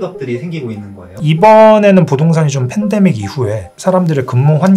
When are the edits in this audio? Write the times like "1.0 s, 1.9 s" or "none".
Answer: 1.2 s